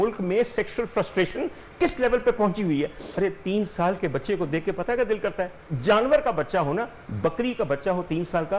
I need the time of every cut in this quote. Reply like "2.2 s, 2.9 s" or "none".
none

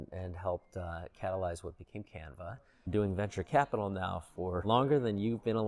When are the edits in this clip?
2.9 s, 4.6 s

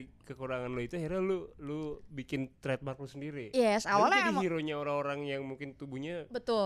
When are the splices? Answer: none

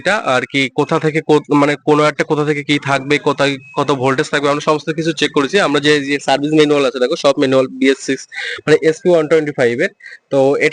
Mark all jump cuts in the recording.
none

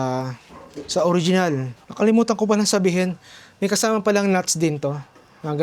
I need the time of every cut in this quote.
1.8 s

